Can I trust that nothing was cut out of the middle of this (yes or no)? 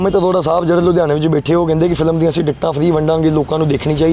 yes